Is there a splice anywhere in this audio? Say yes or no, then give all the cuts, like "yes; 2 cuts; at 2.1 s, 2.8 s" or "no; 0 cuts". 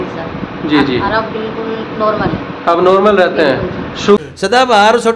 yes; 1 cut; at 4.2 s